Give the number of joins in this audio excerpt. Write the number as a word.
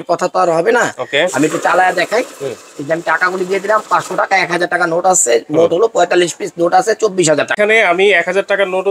one